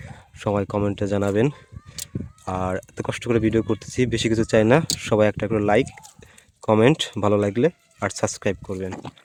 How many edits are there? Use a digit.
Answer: 0